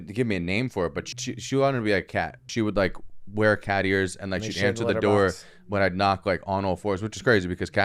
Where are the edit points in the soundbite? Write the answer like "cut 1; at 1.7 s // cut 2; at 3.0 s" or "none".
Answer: cut 1; at 1.1 s // cut 2; at 2.5 s